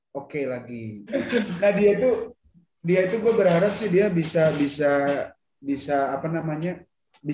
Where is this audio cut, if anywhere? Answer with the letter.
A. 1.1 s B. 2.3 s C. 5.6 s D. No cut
A